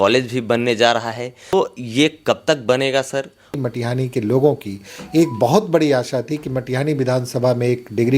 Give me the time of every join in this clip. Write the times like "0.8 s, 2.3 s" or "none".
1.5 s, 3.5 s